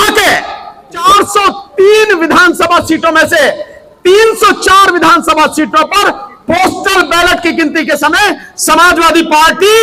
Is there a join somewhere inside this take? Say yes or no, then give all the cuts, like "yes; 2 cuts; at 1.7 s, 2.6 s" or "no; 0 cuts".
yes; 1 cut; at 1.0 s